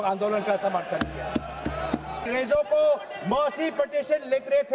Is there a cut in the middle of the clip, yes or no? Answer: yes